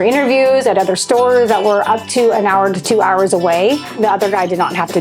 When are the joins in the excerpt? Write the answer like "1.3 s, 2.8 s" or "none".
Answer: 3.9 s